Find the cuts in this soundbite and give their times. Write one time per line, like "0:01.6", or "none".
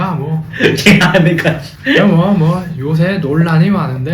0:01.7